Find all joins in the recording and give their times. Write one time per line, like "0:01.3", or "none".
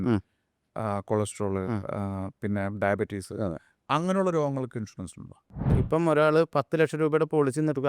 0:05.8